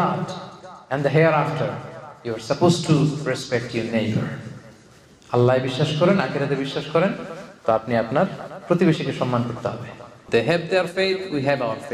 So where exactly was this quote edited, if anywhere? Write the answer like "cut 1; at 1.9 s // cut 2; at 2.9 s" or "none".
cut 1; at 10.2 s